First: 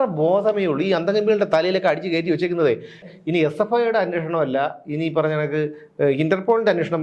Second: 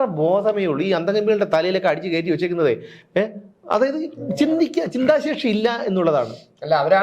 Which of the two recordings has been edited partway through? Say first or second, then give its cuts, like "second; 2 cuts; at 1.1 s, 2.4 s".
first; 1 cut; at 3.0 s